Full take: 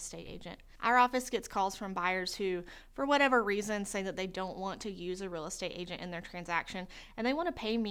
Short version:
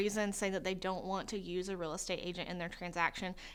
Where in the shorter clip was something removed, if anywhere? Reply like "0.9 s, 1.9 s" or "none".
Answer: none